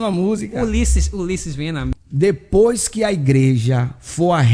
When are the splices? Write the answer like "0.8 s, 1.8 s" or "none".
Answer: 1.9 s